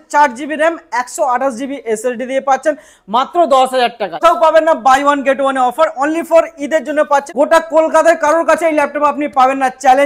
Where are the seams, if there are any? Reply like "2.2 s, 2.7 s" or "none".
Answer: 4.2 s, 7.3 s